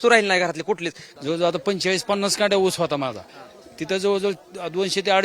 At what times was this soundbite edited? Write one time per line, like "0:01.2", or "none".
0:01.0